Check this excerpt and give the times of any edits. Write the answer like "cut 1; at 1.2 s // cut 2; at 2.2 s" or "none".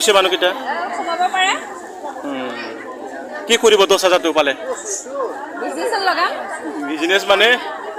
none